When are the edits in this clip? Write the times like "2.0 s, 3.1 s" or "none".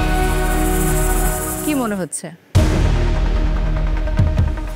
1.6 s

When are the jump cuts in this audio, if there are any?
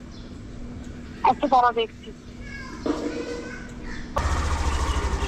4.2 s

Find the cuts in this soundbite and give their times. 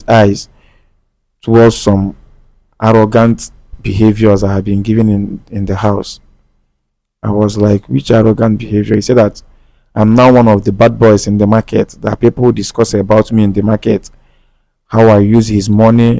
none

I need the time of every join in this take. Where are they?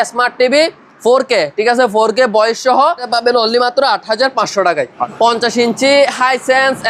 3.1 s, 5.0 s

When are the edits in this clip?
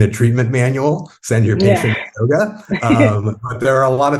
none

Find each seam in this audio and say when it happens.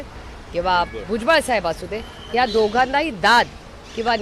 none

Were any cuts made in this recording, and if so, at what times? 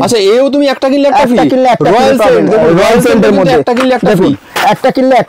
none

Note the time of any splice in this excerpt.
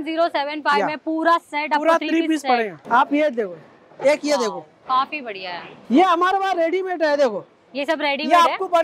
2.8 s, 5.7 s

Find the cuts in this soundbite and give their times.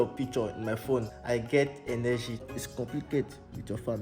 1.1 s, 2.6 s

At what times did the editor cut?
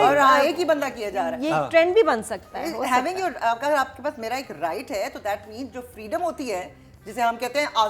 none

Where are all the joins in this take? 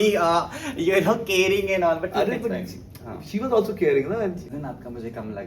4.5 s

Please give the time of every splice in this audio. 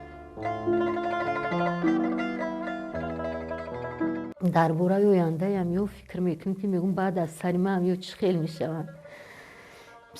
4.3 s

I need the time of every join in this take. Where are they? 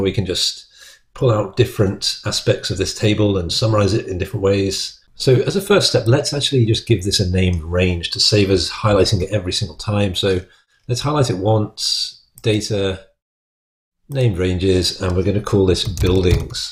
none

